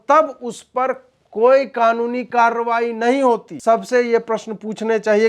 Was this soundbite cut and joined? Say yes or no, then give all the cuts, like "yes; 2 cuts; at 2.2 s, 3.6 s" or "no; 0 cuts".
yes; 1 cut; at 3.5 s